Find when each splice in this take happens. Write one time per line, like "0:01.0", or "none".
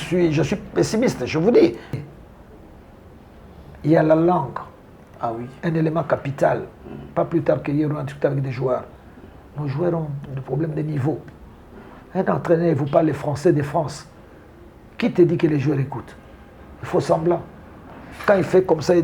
0:02.0